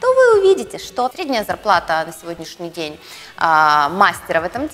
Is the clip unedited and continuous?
no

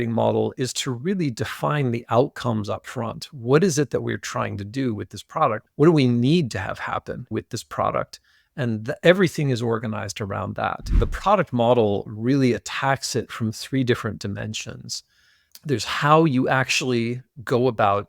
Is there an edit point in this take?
yes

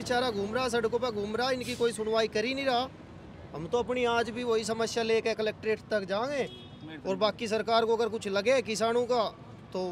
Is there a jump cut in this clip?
no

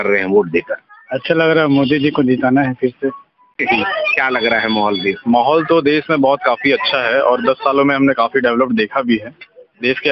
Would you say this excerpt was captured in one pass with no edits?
no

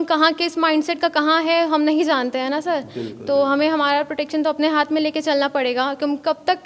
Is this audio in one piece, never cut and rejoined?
yes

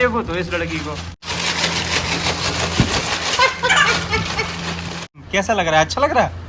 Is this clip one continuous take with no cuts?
no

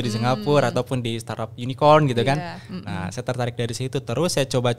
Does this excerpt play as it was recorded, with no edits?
yes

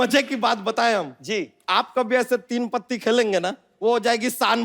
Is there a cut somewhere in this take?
yes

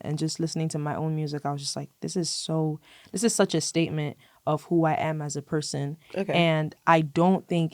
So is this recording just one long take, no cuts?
yes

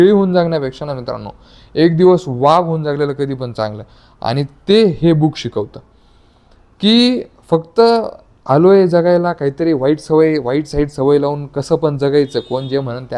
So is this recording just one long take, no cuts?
yes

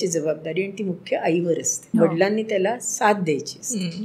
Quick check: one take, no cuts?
no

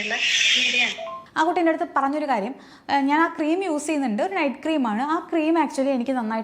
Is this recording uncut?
no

